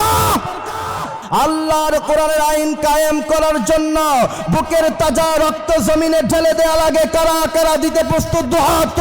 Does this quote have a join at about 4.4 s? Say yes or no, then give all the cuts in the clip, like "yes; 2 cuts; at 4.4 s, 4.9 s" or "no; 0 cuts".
no; 1 cut; at 1.2 s